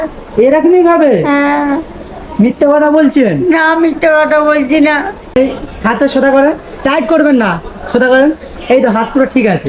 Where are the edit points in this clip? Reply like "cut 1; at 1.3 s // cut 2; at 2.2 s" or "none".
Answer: cut 1; at 5.4 s